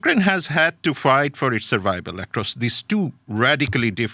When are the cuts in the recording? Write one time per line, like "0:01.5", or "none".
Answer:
none

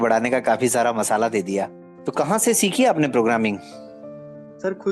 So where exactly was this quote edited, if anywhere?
0:01.8

